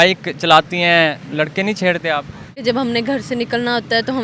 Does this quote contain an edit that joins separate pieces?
yes; 2 cuts; at 1.2 s, 2.6 s

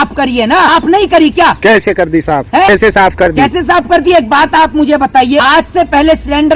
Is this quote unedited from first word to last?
no; 3 cuts; at 0.8 s, 2.7 s, 5.4 s

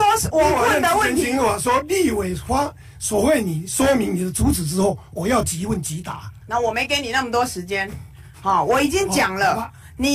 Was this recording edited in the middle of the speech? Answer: no; 0 cuts

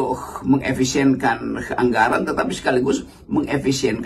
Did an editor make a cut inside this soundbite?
no; 0 cuts

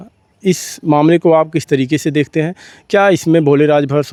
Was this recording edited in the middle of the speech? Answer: no; 0 cuts

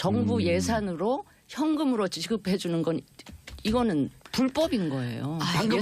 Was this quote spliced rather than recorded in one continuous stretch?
yes; 1 cut; at 2.6 s

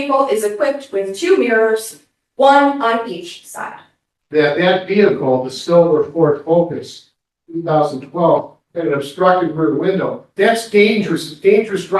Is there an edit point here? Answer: yes; 1 cut; at 3.8 s

